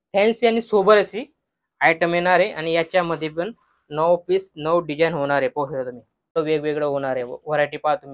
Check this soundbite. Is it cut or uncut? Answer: cut